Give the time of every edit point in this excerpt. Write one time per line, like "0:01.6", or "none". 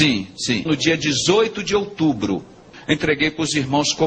0:02.7